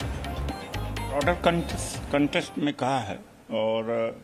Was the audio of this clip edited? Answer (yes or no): yes